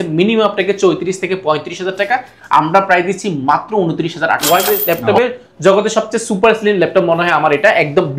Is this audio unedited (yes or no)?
no